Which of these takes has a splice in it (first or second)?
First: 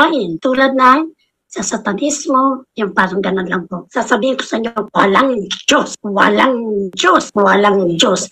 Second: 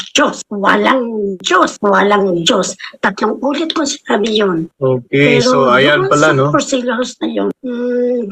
first